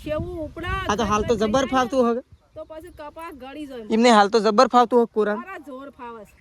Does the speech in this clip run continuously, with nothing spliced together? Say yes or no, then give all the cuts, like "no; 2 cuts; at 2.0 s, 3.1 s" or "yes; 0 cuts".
yes; 0 cuts